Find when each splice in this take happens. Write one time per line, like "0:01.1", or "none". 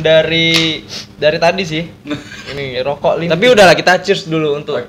0:02.7